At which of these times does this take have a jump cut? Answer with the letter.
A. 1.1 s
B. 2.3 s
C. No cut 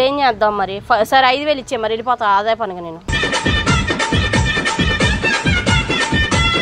C